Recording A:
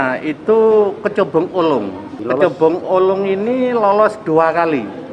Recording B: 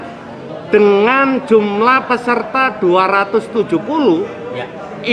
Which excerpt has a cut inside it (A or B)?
A